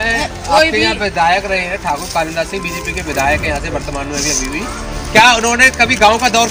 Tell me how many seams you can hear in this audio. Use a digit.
0